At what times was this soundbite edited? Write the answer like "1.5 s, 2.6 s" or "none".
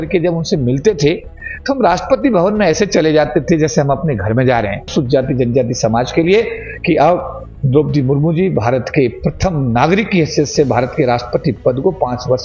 4.9 s